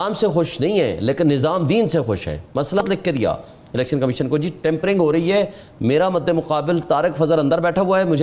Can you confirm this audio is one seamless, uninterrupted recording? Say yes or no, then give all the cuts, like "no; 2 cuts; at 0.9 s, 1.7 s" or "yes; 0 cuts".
no; 1 cut; at 2.7 s